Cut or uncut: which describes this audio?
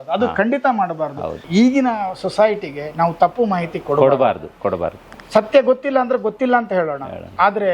cut